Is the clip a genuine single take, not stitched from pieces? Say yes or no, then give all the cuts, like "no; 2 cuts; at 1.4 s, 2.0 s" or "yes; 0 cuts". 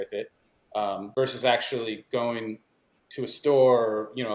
no; 1 cut; at 1.0 s